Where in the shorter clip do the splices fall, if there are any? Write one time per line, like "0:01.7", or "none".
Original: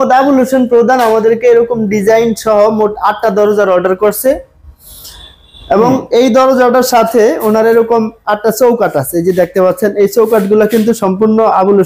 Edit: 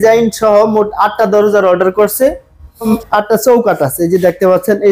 0:02.9